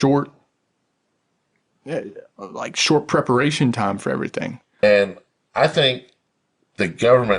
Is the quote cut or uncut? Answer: cut